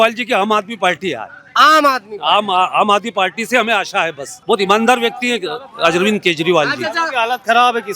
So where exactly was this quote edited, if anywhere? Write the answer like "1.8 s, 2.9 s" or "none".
4.3 s